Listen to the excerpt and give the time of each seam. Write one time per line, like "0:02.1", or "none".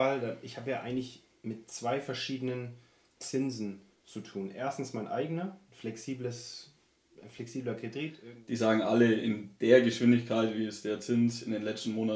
0:08.2